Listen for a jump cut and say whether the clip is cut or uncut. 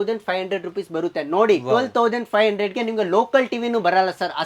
uncut